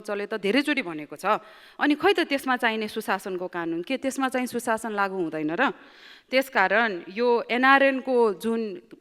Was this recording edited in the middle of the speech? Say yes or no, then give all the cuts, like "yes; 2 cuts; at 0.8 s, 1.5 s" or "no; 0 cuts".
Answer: no; 0 cuts